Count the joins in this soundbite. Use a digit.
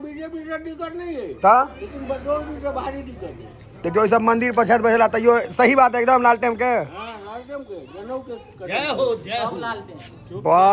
0